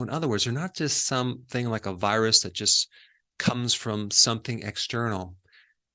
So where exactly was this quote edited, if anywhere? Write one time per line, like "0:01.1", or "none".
none